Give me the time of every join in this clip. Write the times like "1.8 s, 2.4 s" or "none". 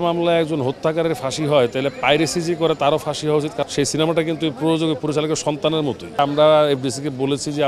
3.6 s, 6.2 s